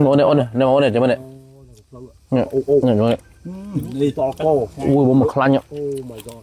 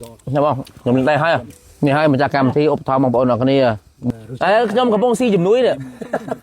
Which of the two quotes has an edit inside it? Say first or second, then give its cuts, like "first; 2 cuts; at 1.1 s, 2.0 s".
second; 2 cuts; at 1.6 s, 4.0 s